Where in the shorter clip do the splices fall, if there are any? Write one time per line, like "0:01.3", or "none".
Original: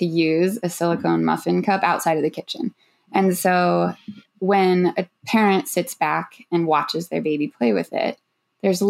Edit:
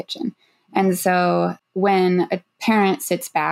0:01.6